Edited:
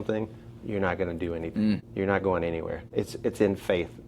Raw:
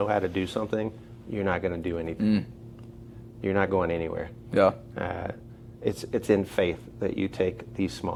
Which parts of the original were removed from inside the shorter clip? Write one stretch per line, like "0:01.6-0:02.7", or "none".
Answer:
0:02.5-0:03.3
0:04.2-0:05.7